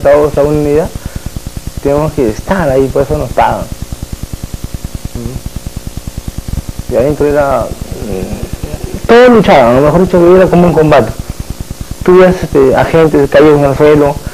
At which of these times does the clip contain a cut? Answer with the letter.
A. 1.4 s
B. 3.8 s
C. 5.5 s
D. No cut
B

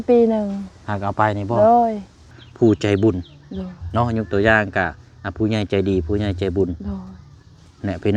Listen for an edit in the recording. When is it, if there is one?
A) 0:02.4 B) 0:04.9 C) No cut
A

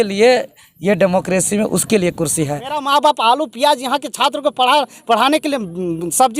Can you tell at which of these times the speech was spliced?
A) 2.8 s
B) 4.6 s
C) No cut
A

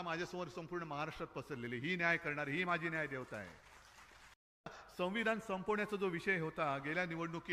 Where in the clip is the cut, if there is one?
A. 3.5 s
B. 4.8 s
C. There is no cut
B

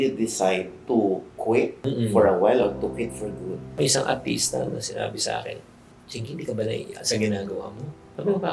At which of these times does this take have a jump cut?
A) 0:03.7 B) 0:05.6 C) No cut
A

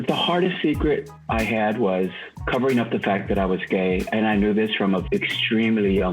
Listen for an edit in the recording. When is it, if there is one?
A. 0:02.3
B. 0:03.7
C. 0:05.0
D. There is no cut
C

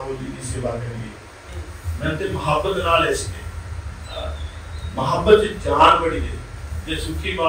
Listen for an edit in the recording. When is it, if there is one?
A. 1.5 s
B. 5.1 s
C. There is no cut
A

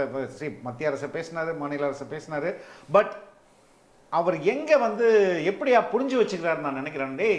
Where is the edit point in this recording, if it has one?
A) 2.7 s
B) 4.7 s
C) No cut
C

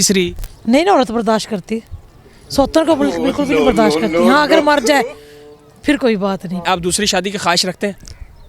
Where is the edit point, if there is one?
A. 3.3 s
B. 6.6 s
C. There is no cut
C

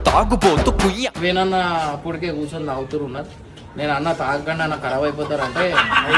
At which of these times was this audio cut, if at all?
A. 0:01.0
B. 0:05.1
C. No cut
A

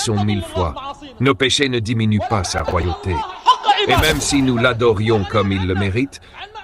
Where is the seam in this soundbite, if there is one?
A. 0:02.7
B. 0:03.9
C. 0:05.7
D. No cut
B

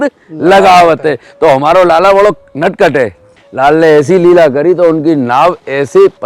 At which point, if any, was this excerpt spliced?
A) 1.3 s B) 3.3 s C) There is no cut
B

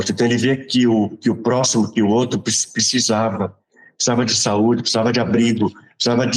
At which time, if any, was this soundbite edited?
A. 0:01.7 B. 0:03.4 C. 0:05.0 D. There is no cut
D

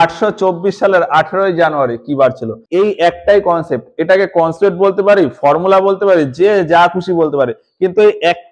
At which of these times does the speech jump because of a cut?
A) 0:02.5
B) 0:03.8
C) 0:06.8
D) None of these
A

